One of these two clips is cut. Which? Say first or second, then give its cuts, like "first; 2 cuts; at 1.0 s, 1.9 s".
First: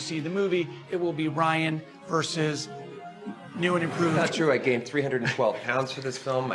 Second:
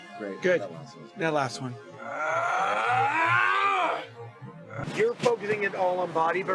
second; 1 cut; at 4.8 s